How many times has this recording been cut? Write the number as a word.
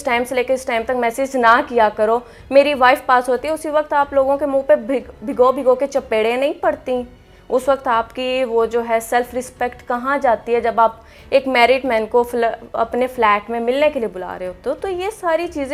zero